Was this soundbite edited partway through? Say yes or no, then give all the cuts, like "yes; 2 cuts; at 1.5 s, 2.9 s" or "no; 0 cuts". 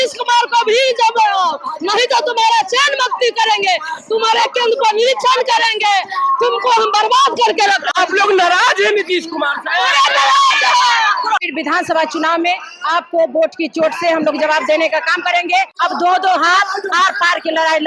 yes; 2 cuts; at 11.5 s, 15.7 s